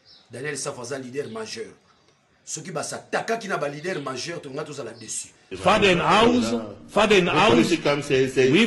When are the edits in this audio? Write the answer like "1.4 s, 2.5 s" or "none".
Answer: 5.4 s